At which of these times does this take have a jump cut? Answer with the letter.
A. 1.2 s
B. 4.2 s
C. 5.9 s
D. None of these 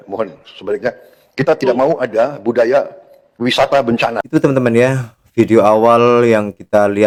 D